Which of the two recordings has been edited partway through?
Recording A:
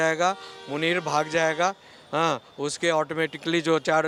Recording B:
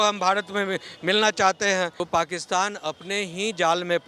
B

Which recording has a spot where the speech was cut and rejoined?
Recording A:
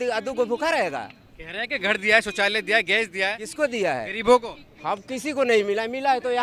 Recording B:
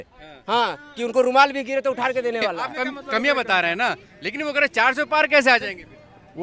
B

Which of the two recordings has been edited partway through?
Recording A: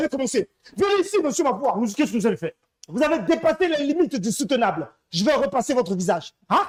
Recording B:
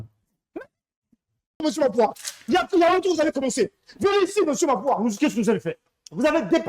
B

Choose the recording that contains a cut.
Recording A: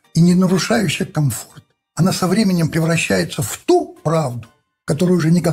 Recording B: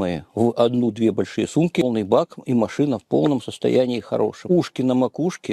B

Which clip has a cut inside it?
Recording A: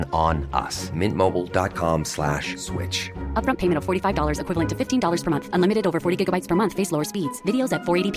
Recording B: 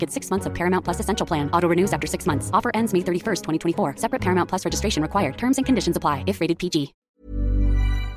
B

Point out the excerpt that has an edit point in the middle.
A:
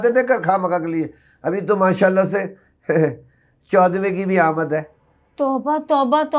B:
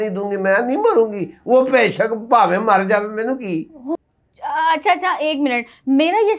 B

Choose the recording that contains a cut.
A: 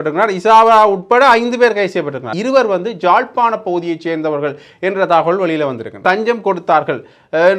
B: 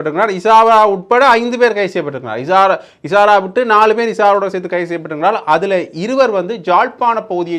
A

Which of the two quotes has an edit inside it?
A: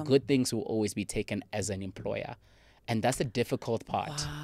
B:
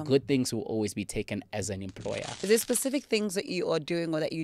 B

